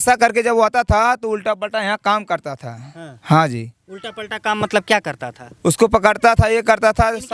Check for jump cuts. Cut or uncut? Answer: uncut